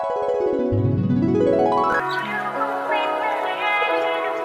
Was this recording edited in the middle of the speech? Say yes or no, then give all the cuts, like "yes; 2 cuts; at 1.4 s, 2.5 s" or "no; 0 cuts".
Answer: yes; 1 cut; at 2.0 s